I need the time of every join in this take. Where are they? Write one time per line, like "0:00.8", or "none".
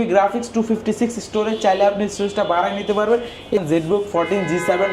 0:03.6